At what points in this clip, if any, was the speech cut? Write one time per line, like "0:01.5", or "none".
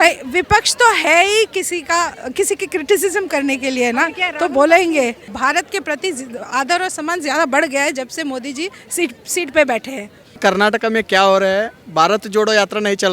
0:05.3
0:10.4